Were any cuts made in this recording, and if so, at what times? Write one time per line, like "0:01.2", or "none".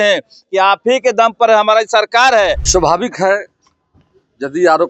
0:02.6